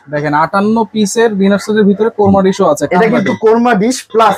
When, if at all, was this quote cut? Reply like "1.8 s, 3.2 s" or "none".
none